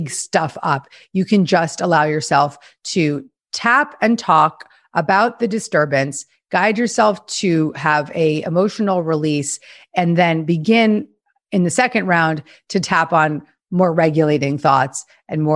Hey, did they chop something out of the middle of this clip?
no; 0 cuts

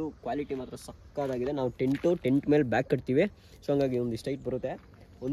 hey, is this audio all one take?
yes; 0 cuts

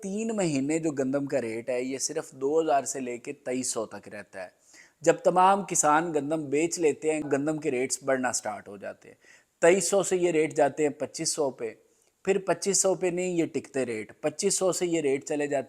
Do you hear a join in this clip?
yes; 1 cut; at 7.3 s

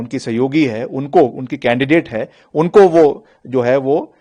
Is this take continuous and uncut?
yes; 0 cuts

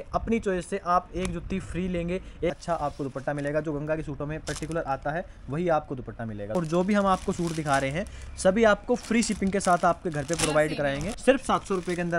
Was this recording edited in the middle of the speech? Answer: yes; 3 cuts; at 2.5 s, 6.5 s, 11.1 s

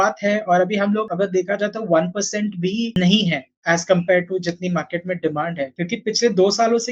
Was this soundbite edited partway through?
yes; 3 cuts; at 1.1 s, 3.0 s, 5.7 s

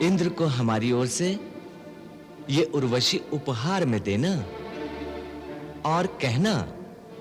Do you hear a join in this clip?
no; 0 cuts

